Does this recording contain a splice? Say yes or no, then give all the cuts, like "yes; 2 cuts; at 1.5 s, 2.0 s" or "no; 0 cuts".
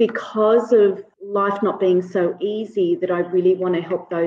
yes; 1 cut; at 1.1 s